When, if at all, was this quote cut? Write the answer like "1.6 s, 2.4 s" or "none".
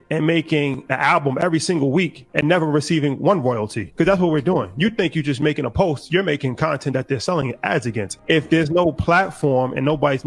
4.1 s